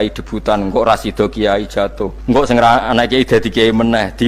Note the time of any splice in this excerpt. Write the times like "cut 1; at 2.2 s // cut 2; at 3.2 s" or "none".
cut 1; at 2.1 s